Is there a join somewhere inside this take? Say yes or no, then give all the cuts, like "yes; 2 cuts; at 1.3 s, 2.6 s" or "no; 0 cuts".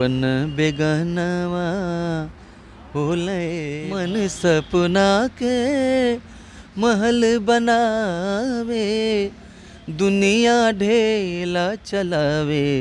yes; 1 cut; at 3.8 s